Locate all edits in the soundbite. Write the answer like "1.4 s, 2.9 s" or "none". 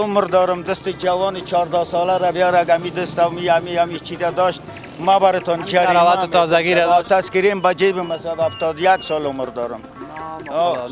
none